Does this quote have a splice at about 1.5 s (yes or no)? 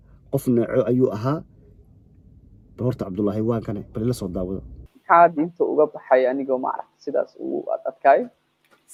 no